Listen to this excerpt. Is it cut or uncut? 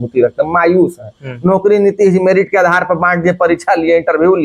uncut